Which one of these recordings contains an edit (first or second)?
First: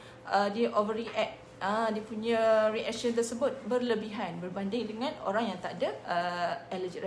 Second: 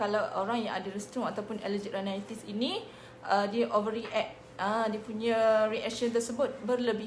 first